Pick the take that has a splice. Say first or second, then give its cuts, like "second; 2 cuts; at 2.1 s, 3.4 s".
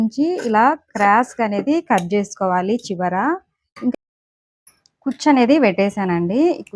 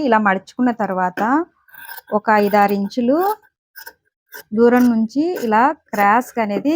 first; 1 cut; at 3.9 s